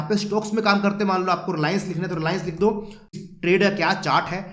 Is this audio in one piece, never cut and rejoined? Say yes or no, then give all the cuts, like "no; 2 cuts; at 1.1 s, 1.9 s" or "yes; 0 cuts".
no; 1 cut; at 3.1 s